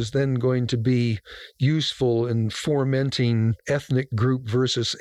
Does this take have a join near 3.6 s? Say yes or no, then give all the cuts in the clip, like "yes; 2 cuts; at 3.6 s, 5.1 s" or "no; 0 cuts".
yes; 1 cut; at 3.6 s